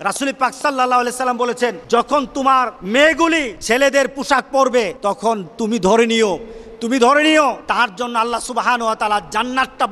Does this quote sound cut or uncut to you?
cut